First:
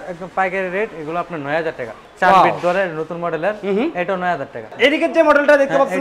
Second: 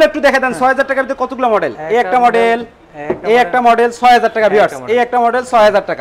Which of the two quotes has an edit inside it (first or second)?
first